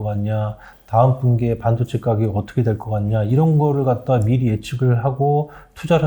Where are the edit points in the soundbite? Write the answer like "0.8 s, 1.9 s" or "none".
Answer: none